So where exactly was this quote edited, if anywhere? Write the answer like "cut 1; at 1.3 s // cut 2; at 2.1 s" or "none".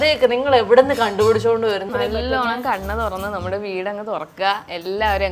cut 1; at 1.9 s